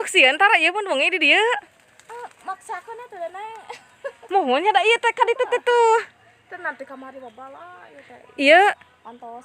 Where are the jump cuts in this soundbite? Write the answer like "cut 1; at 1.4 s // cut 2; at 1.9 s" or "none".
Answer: none

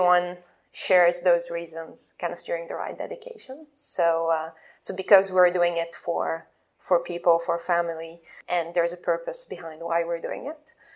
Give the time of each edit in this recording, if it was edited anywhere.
cut 1; at 8.3 s

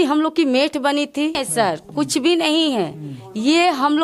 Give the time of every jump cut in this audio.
cut 1; at 1.4 s

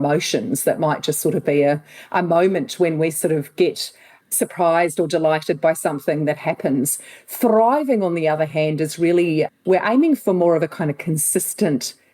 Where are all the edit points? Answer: cut 1; at 4.3 s

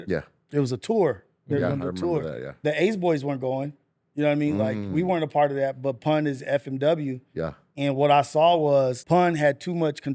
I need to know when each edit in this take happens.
cut 1; at 2.5 s // cut 2; at 9.0 s

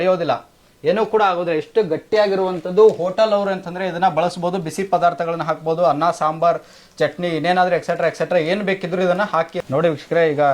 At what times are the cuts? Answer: cut 1; at 9.6 s

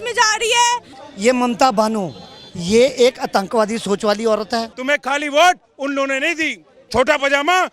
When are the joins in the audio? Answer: cut 1; at 1.0 s // cut 2; at 4.7 s // cut 3; at 6.7 s

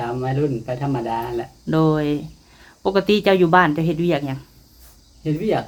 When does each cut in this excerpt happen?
none

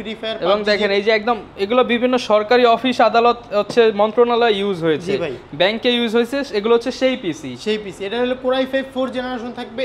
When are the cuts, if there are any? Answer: none

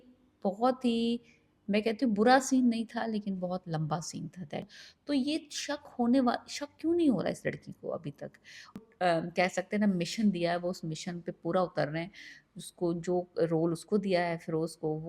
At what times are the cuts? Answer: cut 1; at 4.8 s // cut 2; at 8.8 s

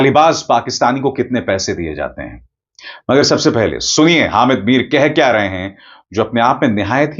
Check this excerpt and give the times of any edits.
none

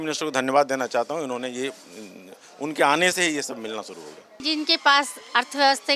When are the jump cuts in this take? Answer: cut 1; at 4.4 s

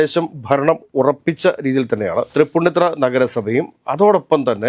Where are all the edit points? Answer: cut 1; at 2.3 s

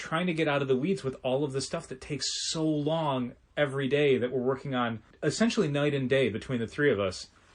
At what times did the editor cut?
cut 1; at 5.1 s

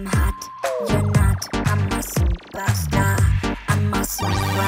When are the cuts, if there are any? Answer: none

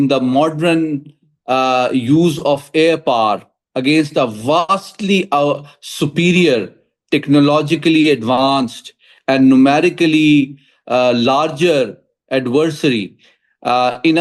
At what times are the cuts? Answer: none

